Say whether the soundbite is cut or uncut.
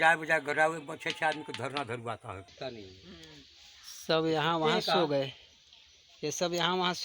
cut